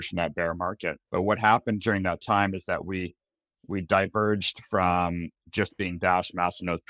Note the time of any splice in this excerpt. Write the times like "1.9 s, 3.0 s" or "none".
1.0 s